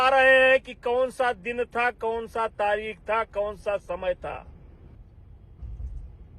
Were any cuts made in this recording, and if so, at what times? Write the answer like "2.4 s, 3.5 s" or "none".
4.9 s